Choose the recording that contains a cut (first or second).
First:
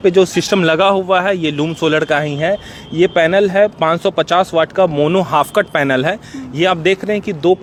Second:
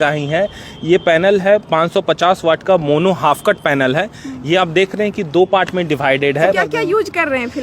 second